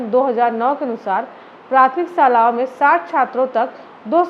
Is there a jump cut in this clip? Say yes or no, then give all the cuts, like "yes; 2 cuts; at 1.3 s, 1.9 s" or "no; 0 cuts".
no; 0 cuts